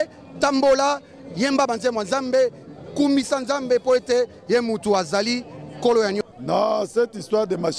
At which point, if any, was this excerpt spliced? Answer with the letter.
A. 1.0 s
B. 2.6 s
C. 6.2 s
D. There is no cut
C